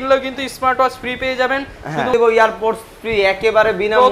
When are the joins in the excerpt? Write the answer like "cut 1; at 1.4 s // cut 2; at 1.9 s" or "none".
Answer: cut 1; at 2.1 s